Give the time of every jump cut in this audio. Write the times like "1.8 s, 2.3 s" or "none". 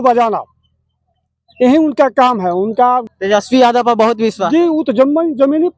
3.1 s